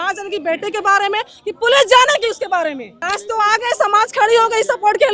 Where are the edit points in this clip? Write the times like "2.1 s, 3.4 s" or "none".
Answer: 2.9 s